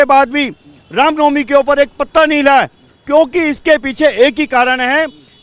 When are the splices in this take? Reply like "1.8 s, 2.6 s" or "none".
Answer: none